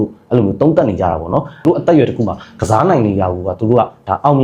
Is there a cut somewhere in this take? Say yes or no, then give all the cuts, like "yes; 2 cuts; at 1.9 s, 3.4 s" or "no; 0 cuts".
yes; 1 cut; at 1.6 s